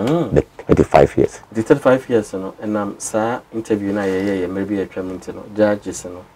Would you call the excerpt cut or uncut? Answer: uncut